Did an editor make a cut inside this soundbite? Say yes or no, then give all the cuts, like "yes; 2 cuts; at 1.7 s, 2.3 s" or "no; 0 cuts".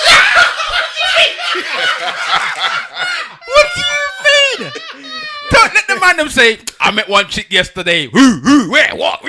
no; 0 cuts